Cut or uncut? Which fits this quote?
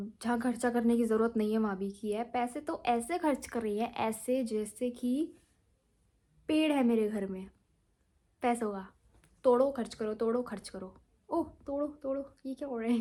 uncut